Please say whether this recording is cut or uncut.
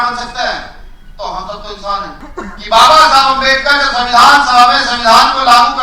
cut